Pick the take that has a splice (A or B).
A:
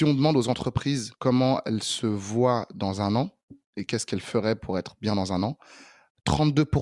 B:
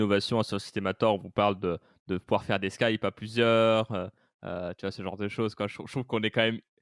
A